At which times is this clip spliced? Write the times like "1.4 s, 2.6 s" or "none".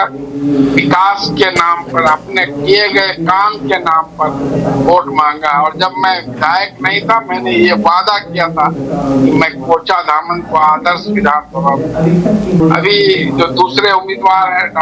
12.6 s